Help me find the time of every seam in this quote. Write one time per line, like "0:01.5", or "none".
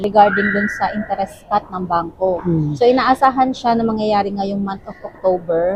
none